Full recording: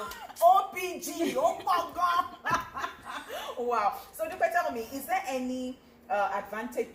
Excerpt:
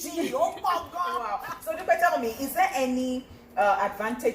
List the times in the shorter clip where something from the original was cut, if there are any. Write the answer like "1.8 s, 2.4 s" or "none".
1.5 s